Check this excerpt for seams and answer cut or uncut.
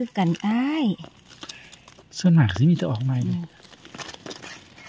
cut